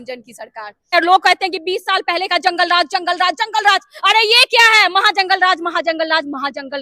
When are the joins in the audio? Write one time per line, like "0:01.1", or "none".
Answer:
0:00.9